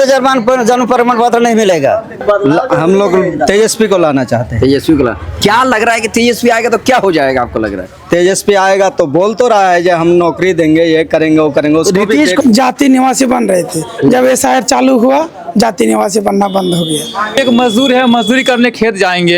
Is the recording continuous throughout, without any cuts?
no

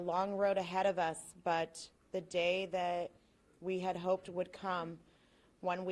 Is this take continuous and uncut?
yes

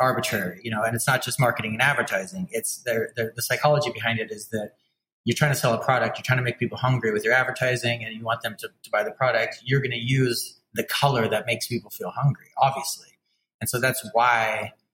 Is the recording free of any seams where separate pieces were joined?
yes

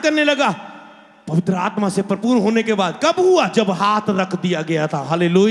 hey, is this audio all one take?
yes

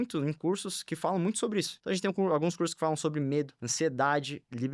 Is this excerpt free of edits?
no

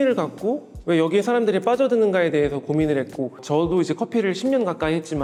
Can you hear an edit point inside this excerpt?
no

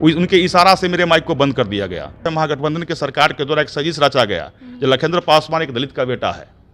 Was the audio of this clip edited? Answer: yes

